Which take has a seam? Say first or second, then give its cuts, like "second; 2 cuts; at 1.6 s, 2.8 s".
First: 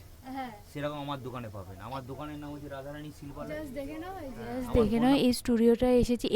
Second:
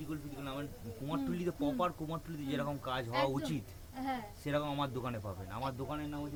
first; 1 cut; at 4.6 s